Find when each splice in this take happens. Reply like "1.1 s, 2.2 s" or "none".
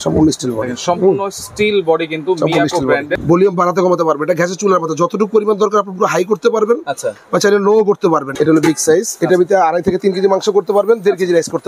3.1 s, 8.3 s